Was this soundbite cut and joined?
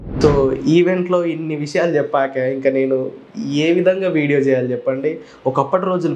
no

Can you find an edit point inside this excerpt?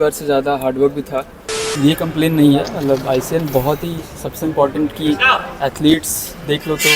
yes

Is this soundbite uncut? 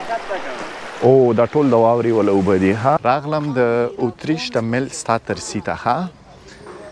no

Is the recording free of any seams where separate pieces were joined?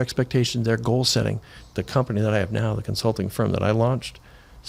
no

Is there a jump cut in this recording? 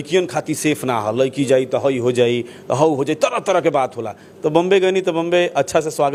no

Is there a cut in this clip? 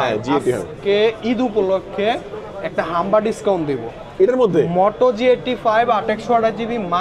no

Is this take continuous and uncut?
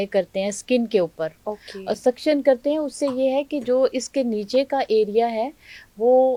yes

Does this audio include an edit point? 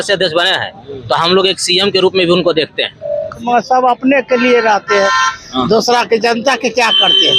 yes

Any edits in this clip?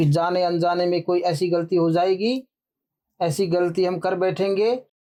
no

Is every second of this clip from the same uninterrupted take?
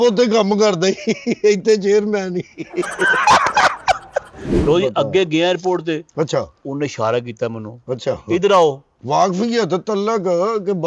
no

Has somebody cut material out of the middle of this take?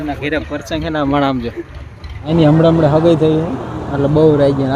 yes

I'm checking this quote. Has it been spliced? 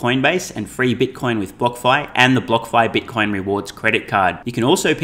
no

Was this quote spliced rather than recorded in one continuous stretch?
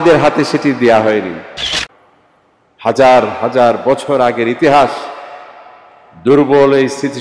yes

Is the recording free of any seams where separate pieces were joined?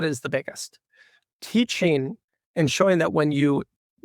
no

